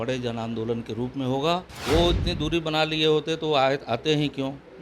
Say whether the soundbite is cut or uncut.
cut